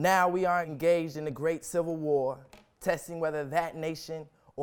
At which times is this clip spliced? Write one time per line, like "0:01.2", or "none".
0:02.0